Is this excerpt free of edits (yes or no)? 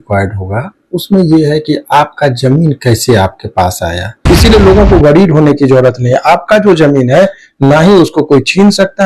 no